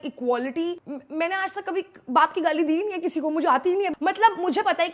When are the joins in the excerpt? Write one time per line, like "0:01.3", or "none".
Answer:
0:00.9
0:03.9